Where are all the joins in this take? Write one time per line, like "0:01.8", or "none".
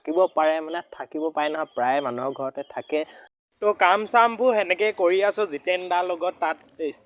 0:03.2